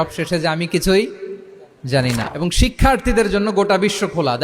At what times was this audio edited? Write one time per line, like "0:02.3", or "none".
0:02.2